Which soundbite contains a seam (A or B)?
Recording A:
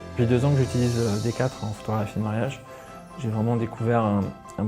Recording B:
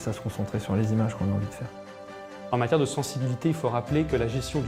A